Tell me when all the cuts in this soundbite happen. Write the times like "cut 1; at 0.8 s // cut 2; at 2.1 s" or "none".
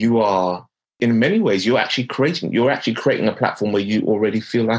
cut 1; at 1.0 s